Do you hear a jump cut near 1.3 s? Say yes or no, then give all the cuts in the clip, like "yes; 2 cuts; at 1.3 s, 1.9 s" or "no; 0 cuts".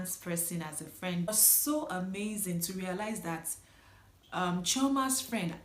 yes; 1 cut; at 1.3 s